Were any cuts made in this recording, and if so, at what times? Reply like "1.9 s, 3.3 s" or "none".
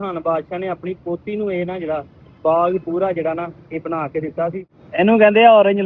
4.8 s